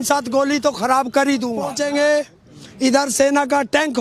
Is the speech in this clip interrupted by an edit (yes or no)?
yes